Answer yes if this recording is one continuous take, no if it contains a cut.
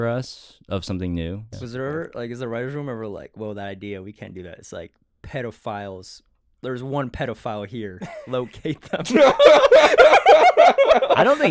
no